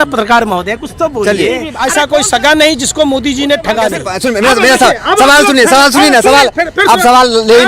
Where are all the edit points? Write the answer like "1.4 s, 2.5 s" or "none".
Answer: 1.7 s, 4.1 s